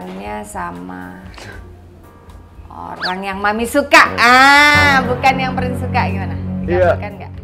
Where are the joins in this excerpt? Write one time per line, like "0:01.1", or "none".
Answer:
none